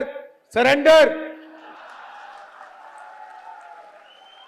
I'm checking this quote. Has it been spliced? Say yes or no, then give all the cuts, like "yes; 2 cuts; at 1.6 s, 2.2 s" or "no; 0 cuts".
yes; 1 cut; at 1.7 s